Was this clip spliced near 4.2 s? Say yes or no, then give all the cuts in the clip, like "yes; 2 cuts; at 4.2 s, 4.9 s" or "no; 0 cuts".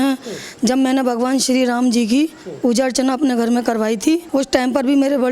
yes; 1 cut; at 4.2 s